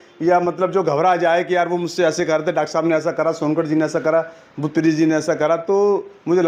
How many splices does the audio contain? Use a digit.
0